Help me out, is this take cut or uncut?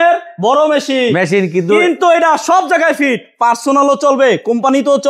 uncut